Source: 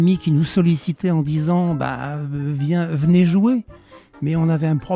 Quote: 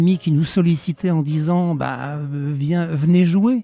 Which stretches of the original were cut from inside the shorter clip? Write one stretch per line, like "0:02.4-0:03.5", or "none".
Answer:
none